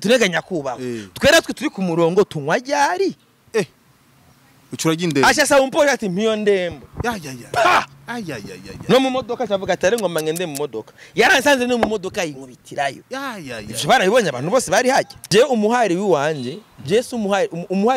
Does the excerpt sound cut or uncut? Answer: cut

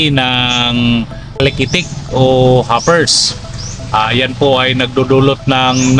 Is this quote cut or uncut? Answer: cut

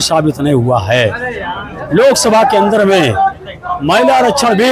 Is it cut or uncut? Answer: uncut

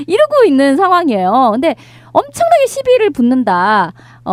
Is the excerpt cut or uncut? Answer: uncut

